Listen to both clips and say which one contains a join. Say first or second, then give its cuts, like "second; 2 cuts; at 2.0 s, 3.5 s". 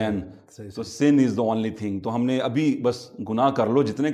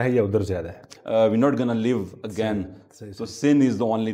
second; 1 cut; at 0.9 s